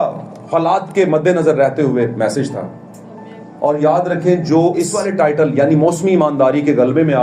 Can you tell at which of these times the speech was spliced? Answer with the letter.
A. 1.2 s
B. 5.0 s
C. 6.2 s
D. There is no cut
B